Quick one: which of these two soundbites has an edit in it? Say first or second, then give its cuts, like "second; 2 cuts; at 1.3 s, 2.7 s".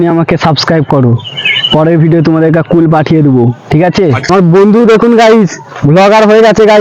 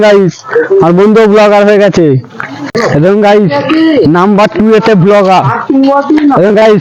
first; 1 cut; at 4.3 s